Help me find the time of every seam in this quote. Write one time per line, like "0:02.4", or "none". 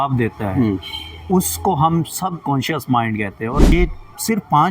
0:03.7